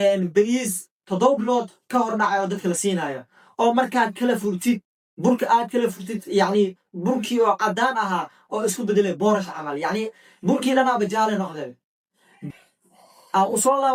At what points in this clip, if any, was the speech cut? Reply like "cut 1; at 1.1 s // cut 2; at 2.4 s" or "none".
none